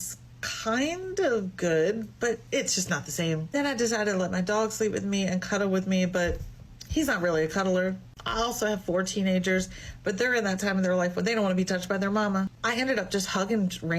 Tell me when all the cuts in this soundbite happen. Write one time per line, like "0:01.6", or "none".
0:02.4
0:12.6